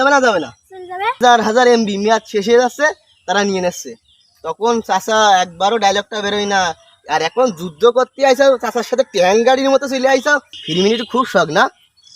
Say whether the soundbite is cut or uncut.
cut